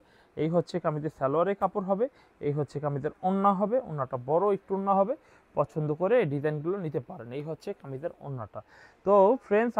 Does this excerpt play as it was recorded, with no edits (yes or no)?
yes